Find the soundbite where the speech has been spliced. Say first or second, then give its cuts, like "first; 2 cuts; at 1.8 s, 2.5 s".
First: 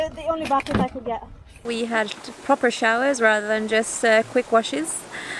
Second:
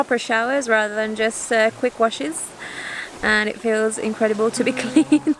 first; 1 cut; at 1.6 s